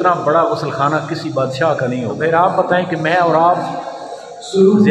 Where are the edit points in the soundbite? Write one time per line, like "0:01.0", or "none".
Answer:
0:02.2